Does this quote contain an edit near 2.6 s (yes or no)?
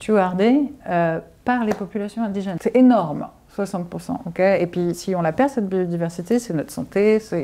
yes